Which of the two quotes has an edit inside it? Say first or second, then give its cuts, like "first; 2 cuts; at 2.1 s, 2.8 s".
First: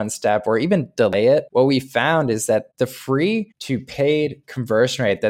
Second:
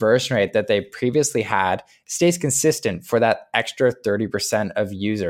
first; 3 cuts; at 1.5 s, 2.7 s, 3.6 s